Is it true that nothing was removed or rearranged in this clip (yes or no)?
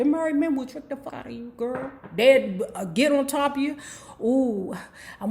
no